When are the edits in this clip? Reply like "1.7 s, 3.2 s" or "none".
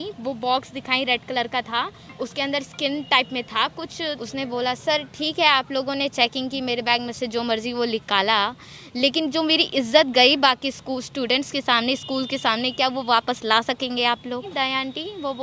3.8 s, 14.5 s